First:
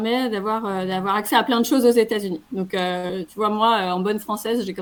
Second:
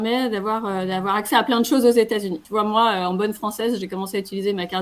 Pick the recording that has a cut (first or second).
second